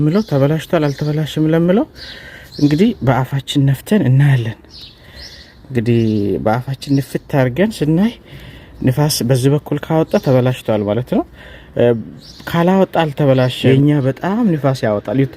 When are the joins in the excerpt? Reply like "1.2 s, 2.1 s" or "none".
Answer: 13.5 s